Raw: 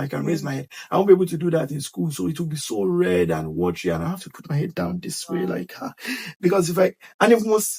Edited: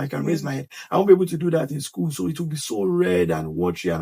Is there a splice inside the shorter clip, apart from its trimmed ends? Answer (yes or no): no